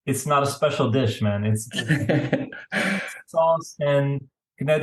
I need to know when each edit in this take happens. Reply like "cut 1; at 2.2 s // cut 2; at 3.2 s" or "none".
none

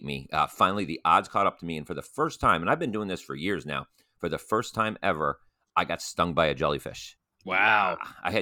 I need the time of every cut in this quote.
none

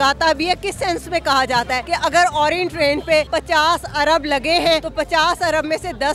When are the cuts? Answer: cut 1; at 1.8 s // cut 2; at 3.3 s // cut 3; at 4.9 s

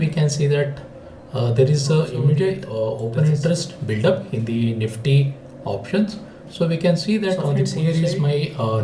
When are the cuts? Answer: cut 1; at 2.7 s // cut 2; at 7.7 s

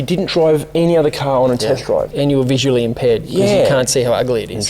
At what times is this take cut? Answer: cut 1; at 2.1 s

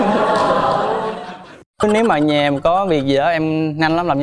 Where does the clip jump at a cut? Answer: cut 1; at 1.5 s

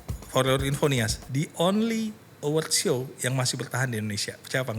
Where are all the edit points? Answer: cut 1; at 1.2 s

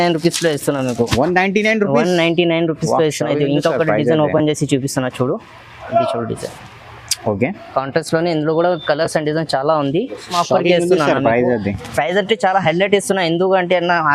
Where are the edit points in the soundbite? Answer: cut 1; at 10.4 s

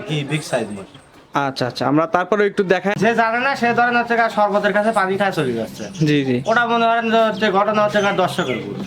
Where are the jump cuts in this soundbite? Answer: cut 1; at 3.0 s

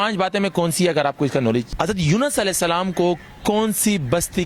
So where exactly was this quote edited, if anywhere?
cut 1; at 1.7 s

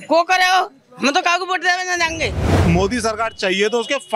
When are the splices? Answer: cut 1; at 2.5 s

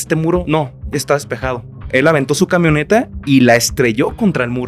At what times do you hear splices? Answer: cut 1; at 1.9 s

